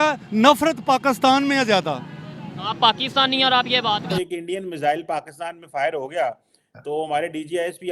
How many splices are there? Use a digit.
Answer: 1